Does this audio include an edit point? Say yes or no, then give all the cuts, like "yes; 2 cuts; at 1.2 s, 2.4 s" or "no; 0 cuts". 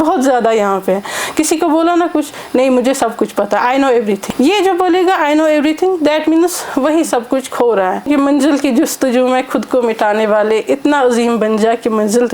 yes; 2 cuts; at 4.2 s, 8.1 s